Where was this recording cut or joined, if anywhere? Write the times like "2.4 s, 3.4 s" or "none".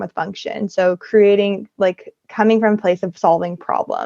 none